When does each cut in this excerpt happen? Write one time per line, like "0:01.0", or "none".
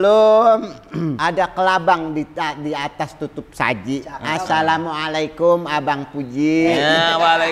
0:01.2